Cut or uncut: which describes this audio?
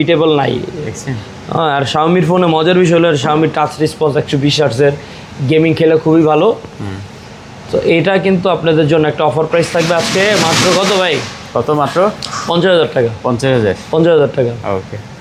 uncut